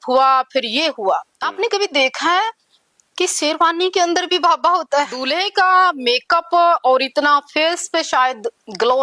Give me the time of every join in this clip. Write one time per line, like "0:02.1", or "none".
0:01.4
0:05.2